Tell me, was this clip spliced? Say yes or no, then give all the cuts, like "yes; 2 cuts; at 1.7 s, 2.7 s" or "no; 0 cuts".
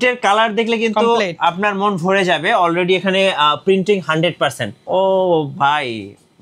yes; 1 cut; at 4.8 s